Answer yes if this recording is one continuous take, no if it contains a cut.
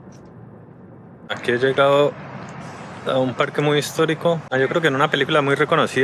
no